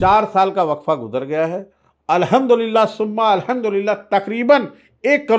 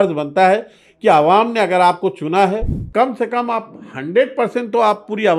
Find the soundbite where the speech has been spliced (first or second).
second